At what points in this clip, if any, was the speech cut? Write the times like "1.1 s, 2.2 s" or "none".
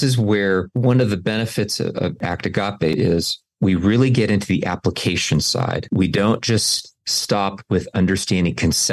2.9 s, 5.8 s